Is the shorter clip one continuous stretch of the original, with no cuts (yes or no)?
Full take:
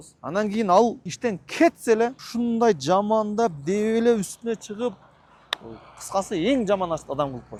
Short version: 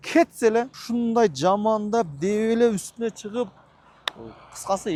yes